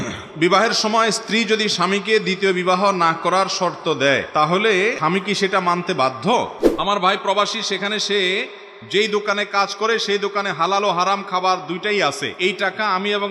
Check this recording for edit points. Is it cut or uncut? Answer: cut